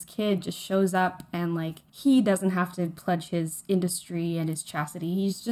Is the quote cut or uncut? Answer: uncut